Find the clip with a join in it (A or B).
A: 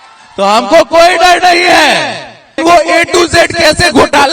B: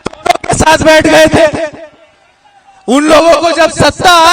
A